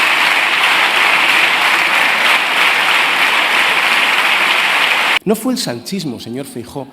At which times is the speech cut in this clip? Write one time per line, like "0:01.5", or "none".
0:05.2